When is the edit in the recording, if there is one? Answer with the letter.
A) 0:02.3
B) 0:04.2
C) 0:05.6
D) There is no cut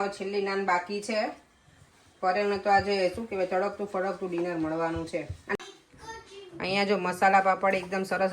C